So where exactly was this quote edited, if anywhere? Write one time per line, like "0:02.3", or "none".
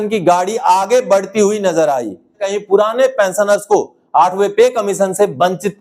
0:02.4